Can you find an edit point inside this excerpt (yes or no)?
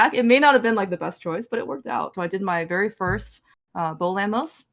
yes